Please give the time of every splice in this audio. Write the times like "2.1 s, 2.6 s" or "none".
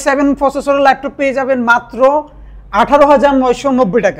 none